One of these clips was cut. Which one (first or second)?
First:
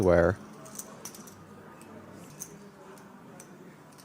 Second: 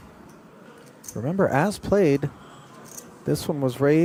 first